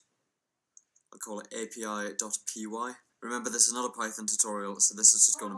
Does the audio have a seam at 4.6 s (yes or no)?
yes